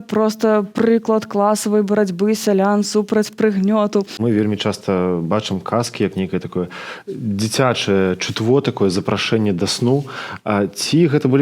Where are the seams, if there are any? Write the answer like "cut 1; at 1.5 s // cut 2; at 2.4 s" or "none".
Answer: cut 1; at 4.1 s